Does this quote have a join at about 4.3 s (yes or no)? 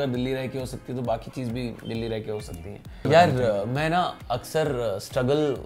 no